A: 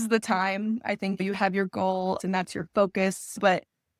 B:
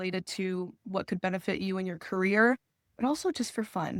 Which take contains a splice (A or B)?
A